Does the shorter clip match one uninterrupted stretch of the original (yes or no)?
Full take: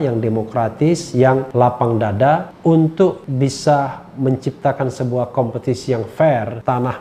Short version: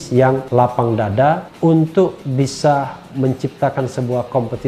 yes